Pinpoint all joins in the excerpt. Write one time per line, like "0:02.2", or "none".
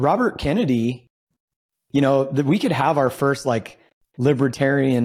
none